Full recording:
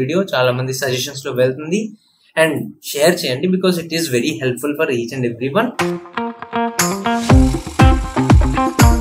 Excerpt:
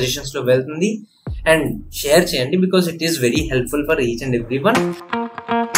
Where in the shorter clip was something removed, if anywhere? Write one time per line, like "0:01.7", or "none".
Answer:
0:04.8